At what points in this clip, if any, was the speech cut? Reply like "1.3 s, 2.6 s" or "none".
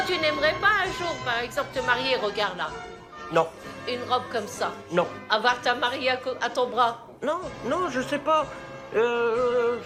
none